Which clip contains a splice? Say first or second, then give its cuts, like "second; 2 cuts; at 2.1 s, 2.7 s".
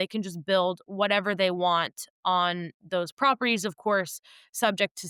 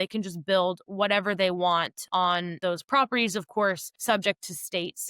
second; 2 cuts; at 2.2 s, 3.9 s